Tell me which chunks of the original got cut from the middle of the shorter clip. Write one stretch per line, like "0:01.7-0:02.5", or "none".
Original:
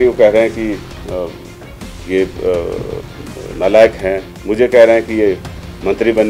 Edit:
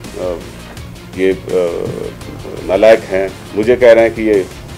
none